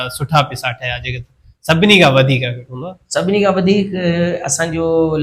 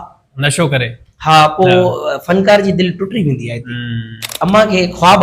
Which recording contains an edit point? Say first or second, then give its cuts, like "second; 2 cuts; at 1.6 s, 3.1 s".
second; 1 cut; at 4.3 s